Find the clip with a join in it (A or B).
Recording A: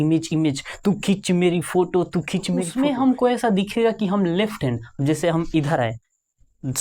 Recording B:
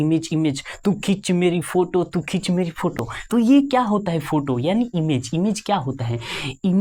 A